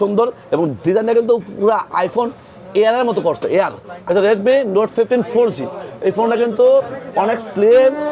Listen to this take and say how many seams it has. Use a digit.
1